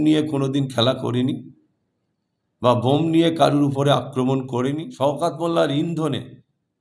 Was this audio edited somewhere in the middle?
yes; 1 cut; at 4.8 s

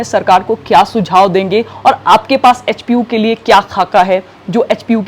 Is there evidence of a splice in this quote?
no; 0 cuts

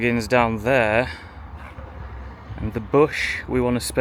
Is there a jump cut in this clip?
no; 0 cuts

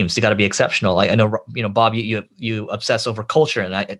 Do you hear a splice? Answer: no; 0 cuts

